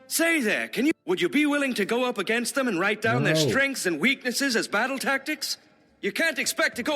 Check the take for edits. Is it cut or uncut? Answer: cut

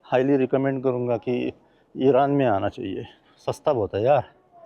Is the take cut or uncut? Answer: cut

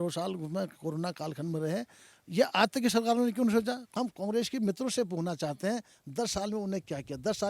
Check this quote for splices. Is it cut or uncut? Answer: cut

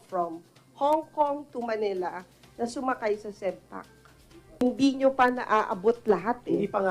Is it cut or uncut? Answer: cut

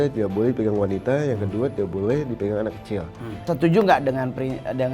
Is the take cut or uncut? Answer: cut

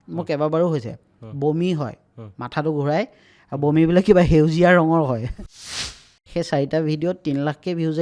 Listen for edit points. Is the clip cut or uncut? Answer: cut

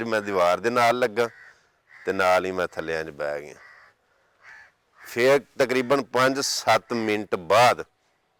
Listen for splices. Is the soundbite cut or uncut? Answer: uncut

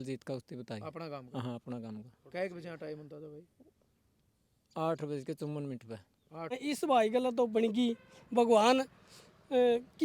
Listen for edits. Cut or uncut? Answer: cut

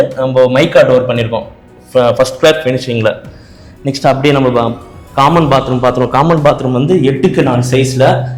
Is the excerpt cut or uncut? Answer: uncut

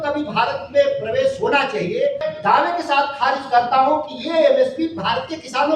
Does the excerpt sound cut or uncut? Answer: cut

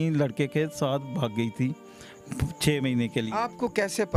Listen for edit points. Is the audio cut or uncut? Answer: uncut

